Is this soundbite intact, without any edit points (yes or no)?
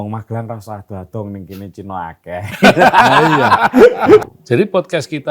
no